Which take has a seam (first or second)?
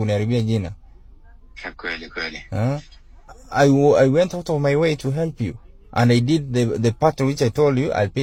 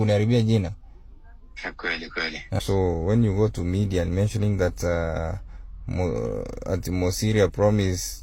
second